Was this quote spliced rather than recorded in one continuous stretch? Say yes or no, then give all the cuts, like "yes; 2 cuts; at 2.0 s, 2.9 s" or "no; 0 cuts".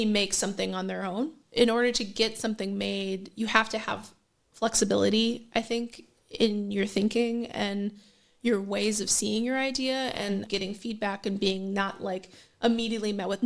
yes; 2 cuts; at 1.4 s, 10.5 s